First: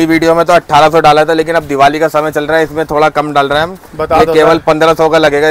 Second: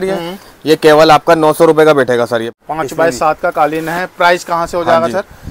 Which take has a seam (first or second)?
second